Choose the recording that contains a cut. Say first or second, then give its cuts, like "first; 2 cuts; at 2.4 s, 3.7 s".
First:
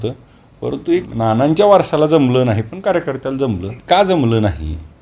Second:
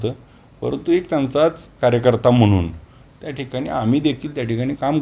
first; 2 cuts; at 1.1 s, 3.8 s